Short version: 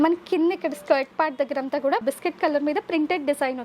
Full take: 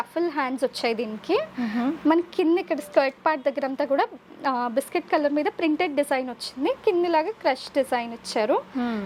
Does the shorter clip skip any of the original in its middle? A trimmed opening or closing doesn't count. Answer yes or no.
yes